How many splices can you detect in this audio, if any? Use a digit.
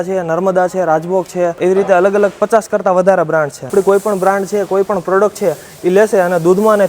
2